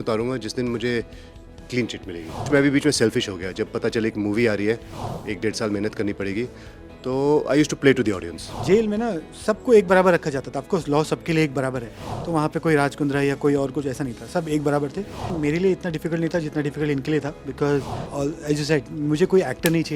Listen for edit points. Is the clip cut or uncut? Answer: cut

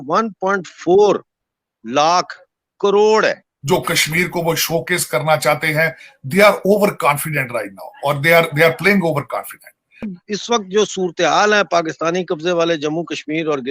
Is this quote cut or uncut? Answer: cut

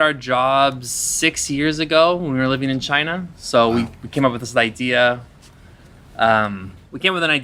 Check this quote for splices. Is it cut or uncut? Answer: uncut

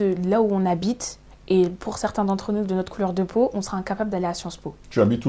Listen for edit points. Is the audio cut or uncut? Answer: uncut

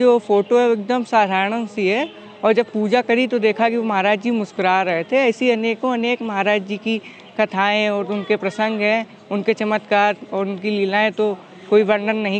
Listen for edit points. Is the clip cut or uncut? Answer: uncut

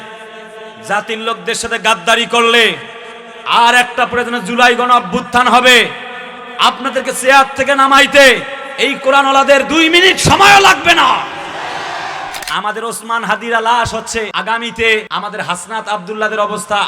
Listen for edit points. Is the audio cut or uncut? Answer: cut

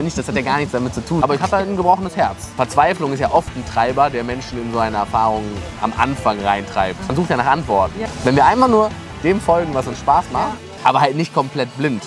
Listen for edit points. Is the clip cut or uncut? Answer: cut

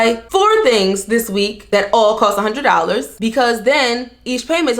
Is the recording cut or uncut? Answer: cut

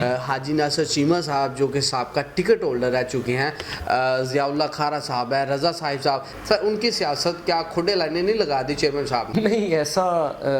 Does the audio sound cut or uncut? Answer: cut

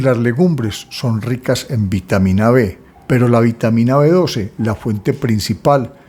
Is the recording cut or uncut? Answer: uncut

